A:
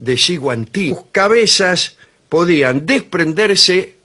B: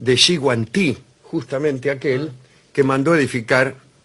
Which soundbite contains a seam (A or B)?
B